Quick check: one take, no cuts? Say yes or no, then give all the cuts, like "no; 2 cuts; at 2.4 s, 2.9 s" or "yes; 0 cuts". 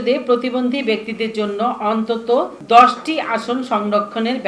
no; 1 cut; at 2.6 s